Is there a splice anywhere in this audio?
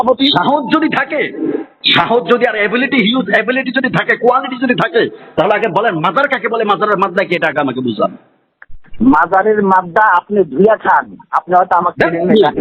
no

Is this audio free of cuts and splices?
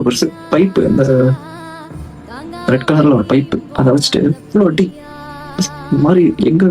yes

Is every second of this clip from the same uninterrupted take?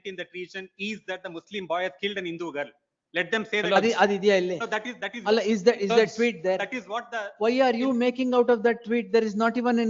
yes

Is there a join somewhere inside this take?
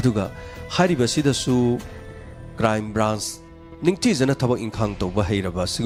no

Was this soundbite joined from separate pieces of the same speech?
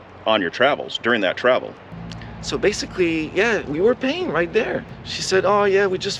yes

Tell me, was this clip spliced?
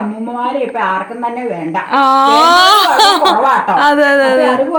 no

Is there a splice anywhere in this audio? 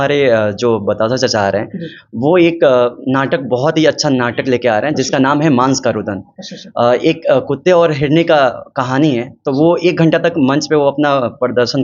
no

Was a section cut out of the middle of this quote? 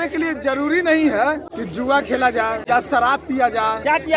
yes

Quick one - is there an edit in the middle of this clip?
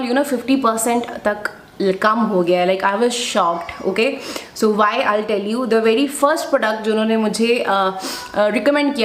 no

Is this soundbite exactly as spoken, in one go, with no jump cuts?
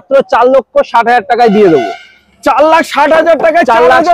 yes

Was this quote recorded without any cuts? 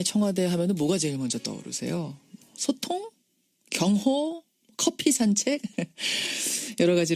yes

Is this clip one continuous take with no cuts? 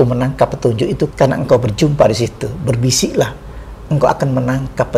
no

